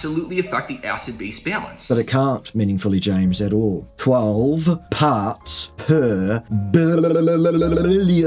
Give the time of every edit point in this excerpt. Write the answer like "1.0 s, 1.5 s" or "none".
none

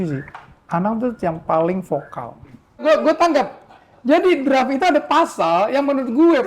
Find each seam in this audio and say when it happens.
2.8 s

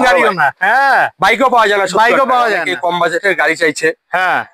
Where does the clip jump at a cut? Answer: 2.7 s

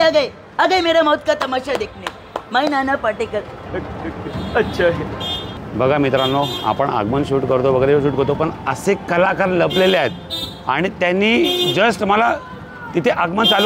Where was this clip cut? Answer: none

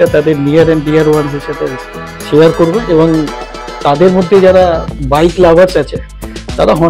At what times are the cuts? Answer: none

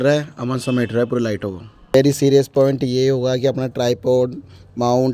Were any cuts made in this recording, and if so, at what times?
1.9 s

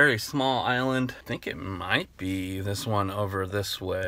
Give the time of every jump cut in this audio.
1.2 s

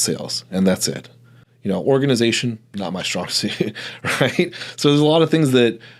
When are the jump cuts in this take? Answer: none

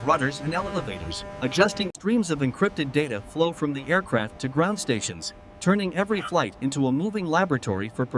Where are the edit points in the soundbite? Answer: 1.9 s

